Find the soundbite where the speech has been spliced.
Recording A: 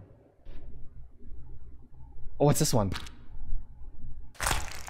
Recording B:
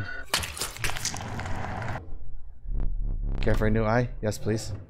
B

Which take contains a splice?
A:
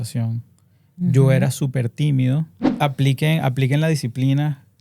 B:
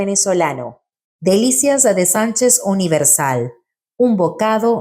A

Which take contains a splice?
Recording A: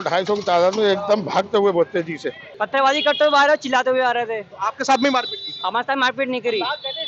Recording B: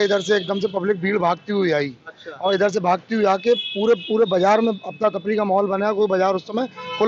A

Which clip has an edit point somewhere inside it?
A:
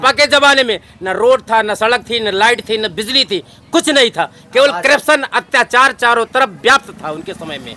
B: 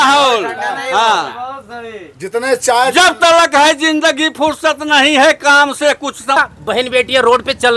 B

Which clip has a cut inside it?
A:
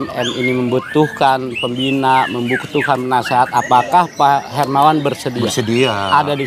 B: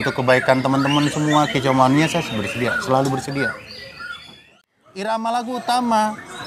B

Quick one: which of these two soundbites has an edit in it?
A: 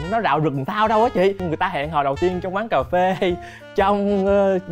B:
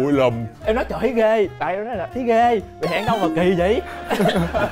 A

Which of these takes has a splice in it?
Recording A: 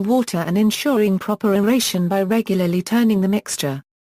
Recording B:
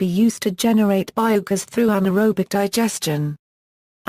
A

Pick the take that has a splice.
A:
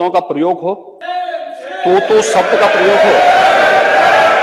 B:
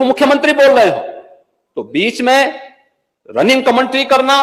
A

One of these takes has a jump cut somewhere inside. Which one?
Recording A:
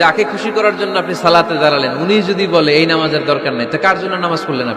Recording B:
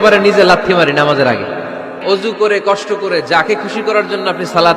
B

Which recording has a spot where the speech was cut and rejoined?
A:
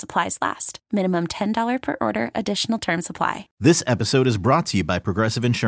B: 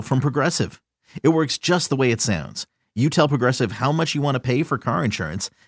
A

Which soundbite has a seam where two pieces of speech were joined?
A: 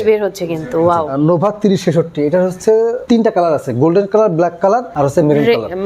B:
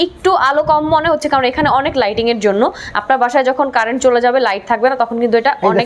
A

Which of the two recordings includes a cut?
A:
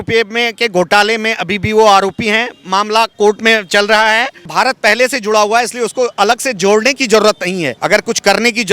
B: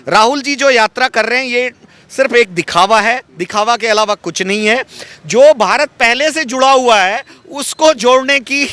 A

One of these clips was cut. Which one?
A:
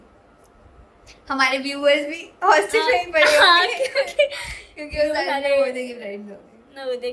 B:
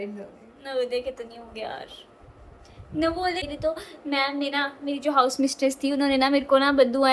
B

